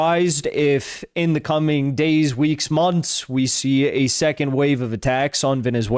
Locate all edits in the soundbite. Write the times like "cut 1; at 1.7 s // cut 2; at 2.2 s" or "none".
none